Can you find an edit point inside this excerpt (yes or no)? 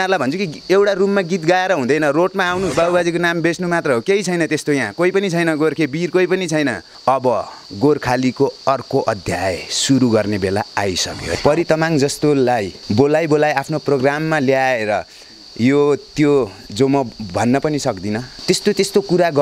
yes